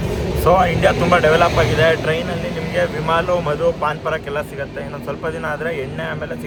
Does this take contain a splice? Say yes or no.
no